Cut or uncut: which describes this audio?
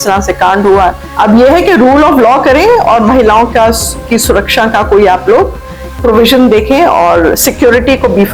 uncut